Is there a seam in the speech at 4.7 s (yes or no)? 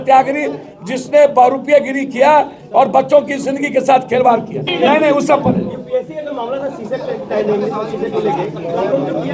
no